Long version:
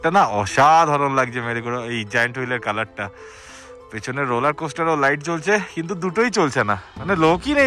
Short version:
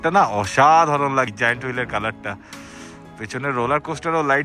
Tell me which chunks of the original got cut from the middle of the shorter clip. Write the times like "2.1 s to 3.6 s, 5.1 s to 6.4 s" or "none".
1.3 s to 2.0 s